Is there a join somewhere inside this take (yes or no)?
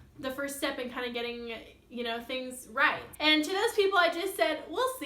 yes